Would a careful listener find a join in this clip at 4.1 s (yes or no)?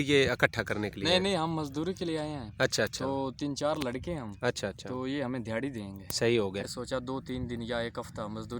no